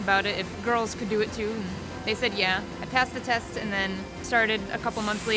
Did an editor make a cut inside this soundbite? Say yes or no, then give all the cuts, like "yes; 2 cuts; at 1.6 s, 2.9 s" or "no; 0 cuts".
yes; 2 cuts; at 2.8 s, 4.1 s